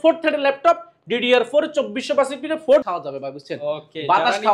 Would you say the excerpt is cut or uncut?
cut